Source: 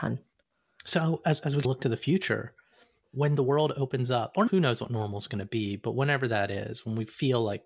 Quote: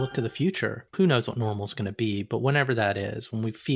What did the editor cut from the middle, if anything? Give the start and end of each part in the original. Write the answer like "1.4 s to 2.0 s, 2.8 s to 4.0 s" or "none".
2.6 s to 4.5 s